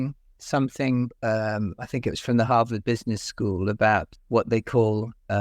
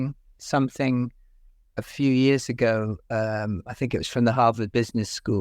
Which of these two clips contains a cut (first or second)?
first